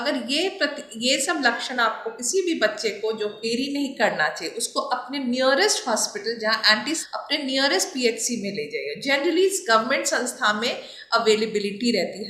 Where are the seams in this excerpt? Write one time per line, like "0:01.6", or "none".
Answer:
0:03.5
0:07.0